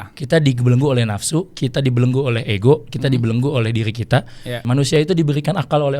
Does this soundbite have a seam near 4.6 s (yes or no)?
yes